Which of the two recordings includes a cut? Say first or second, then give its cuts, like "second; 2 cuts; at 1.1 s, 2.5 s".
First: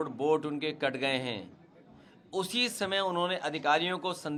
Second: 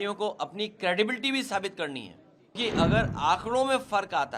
second; 1 cut; at 2.6 s